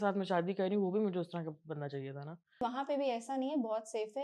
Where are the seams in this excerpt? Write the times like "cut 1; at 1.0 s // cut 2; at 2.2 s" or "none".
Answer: cut 1; at 2.6 s